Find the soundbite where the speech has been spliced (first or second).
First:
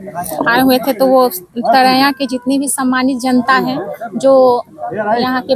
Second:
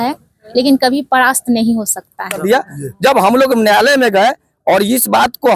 second